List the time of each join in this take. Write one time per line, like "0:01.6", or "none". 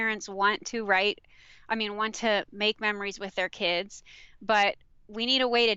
none